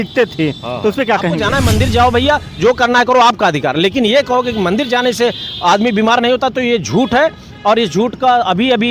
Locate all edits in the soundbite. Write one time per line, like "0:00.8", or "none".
0:01.4